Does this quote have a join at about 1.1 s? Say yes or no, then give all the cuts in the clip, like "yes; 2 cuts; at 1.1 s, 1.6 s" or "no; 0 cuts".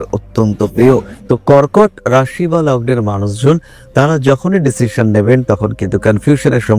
yes; 1 cut; at 1.1 s